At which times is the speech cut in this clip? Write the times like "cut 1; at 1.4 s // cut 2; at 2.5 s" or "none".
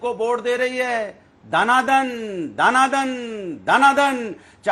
none